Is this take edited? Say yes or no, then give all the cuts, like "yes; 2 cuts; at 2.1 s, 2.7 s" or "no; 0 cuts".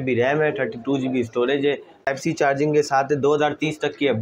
yes; 1 cut; at 2.0 s